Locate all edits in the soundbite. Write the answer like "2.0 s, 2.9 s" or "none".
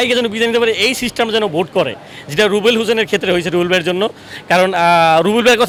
none